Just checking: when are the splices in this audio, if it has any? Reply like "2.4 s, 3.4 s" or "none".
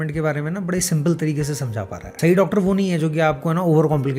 2.0 s